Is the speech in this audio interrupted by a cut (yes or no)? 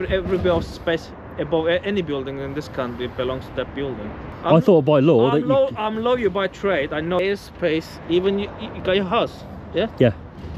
yes